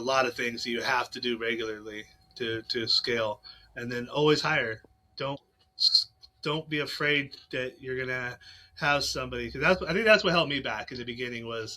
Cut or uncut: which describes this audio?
uncut